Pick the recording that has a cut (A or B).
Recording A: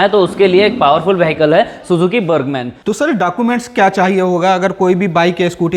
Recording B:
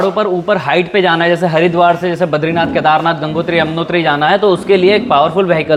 A